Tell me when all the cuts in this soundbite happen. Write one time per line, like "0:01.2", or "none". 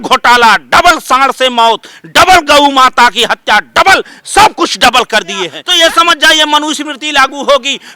0:05.6